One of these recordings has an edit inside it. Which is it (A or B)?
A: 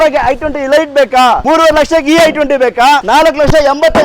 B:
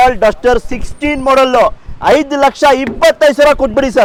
A